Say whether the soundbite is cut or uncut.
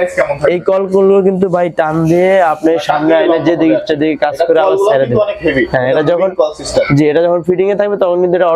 uncut